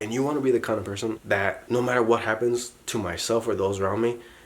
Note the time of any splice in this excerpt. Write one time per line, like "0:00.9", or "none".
0:01.2